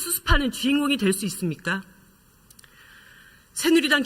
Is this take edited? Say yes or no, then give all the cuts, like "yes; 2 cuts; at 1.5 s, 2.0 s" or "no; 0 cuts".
yes; 1 cut; at 1.5 s